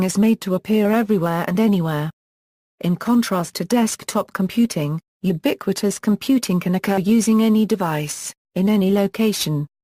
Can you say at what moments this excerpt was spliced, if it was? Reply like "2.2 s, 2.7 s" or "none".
none